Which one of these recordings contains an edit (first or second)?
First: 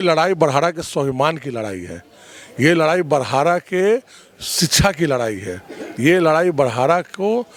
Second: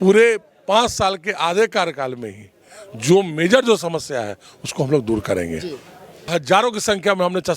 second